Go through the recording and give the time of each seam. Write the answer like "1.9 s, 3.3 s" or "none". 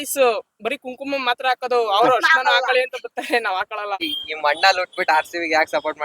4.0 s